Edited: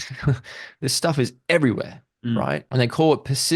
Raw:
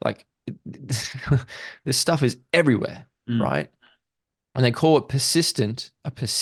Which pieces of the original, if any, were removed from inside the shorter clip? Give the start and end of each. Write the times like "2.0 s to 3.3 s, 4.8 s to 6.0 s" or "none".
3.7 s to 4.5 s